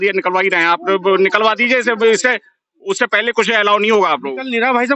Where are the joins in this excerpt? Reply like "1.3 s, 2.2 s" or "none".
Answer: none